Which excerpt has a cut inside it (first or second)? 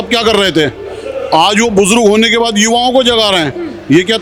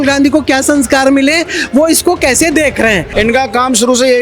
second